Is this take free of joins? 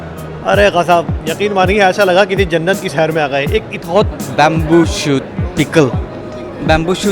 no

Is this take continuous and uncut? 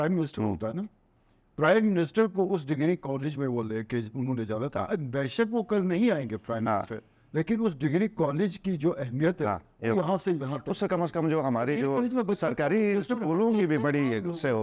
yes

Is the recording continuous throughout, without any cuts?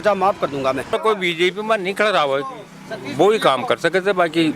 no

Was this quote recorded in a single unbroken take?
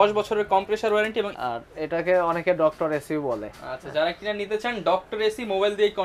no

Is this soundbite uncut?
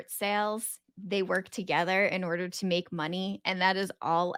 yes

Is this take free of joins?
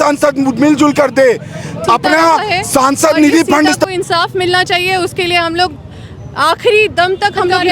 no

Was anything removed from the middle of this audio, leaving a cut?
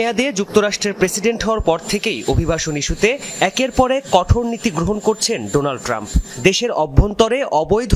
no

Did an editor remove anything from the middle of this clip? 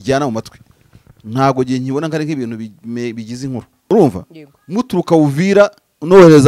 yes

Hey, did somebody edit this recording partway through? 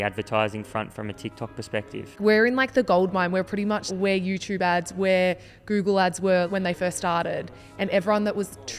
yes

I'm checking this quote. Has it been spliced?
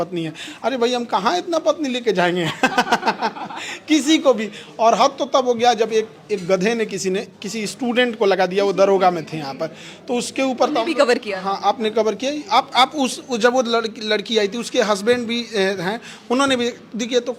no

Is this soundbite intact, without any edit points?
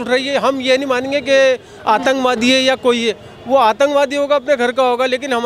yes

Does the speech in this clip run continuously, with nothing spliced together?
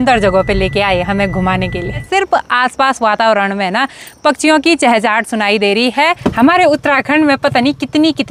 no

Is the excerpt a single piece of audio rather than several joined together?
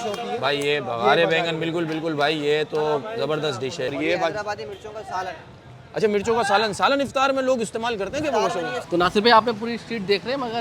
no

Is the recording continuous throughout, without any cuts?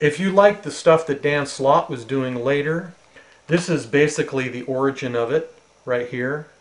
yes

